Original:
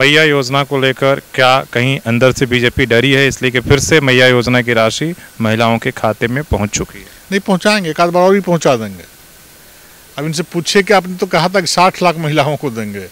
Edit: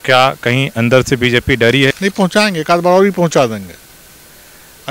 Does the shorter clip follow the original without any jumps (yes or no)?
no